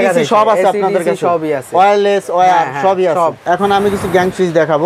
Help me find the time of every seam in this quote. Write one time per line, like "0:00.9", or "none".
none